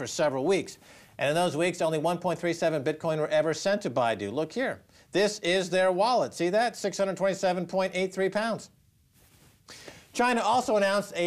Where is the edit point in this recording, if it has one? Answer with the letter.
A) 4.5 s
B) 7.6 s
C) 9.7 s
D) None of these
B